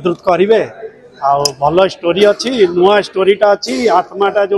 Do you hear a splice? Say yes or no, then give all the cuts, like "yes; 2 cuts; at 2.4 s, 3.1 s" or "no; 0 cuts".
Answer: no; 0 cuts